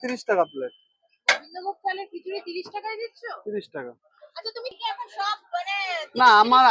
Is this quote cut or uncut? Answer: cut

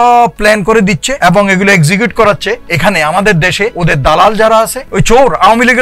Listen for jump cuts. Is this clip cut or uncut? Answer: cut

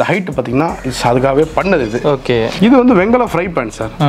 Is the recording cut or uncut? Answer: cut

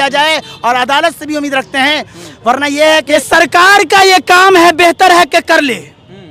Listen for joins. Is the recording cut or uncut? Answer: cut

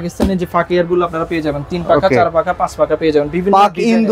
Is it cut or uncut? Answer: uncut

